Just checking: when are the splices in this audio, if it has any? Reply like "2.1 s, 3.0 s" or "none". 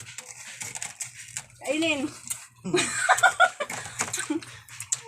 2.6 s